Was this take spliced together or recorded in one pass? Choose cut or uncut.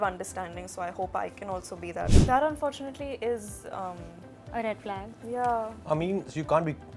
cut